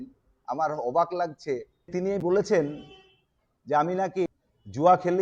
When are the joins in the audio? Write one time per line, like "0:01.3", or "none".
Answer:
0:01.9
0:04.3